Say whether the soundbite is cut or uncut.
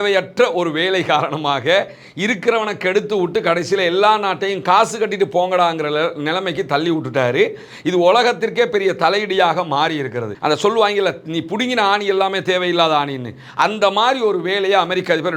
cut